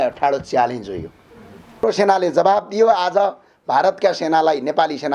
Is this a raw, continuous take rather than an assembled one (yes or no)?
no